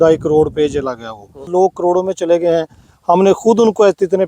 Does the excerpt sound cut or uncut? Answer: cut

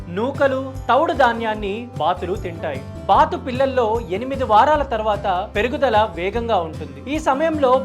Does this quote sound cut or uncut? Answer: cut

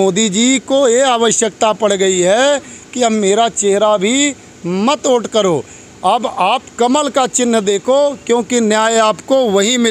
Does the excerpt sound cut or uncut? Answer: uncut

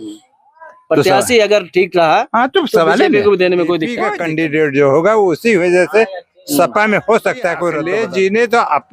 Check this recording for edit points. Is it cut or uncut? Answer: cut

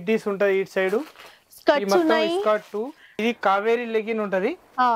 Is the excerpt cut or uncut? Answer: cut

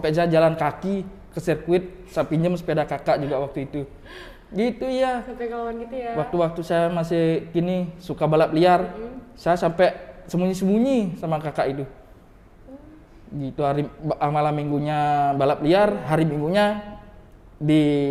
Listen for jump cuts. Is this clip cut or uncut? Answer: uncut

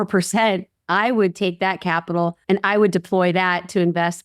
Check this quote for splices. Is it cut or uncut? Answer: cut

